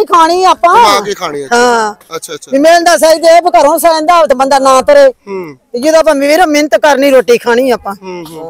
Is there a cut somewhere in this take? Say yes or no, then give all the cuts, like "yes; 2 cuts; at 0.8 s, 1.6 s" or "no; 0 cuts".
no; 0 cuts